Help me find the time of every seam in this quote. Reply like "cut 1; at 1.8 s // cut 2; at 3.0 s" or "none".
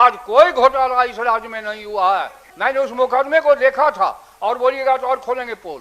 cut 1; at 2.4 s